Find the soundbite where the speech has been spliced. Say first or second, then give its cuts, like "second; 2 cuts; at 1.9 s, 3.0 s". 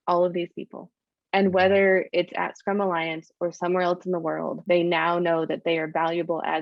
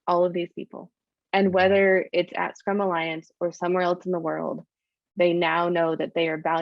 first; 1 cut; at 4.6 s